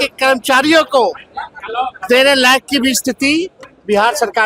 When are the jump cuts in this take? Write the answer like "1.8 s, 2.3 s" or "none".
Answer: none